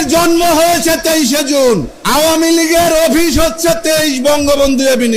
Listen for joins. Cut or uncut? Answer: cut